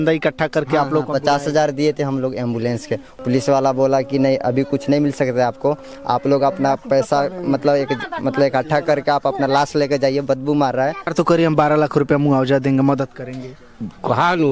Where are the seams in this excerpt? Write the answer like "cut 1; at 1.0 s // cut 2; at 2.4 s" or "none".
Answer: cut 1; at 3.1 s // cut 2; at 11.1 s